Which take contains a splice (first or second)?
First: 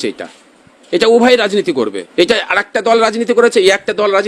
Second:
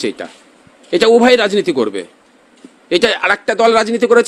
first